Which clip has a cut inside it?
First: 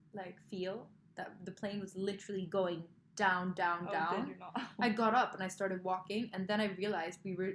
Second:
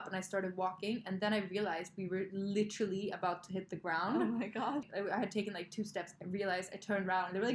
second; 1 cut; at 4.8 s

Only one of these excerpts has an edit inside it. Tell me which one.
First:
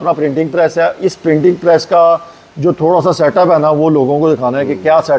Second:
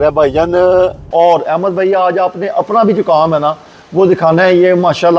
second; 1 cut; at 1.0 s

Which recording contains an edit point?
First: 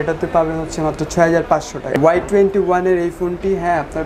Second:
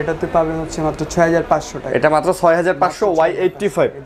first; 1 cut; at 2.0 s

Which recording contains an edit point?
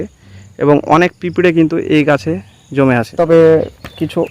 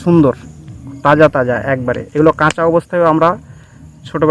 first; 1 cut; at 3.2 s

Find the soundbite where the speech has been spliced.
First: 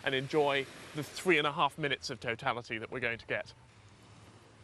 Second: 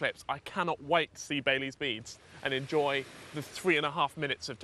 first; 1 cut; at 3.6 s

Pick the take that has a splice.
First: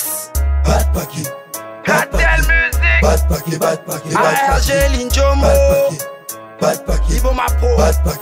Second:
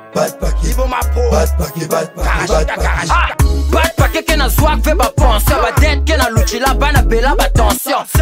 second; 1 cut; at 3.5 s

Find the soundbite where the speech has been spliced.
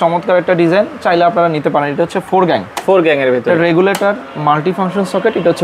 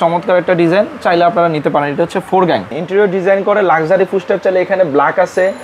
second; 1 cut; at 2.8 s

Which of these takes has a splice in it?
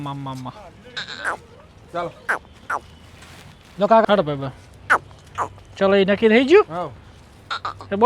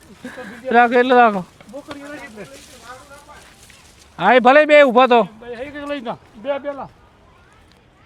first; 1 cut; at 4.0 s

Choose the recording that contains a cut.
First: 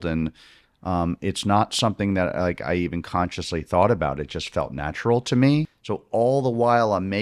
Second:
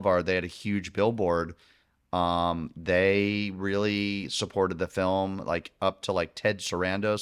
first; 1 cut; at 5.8 s

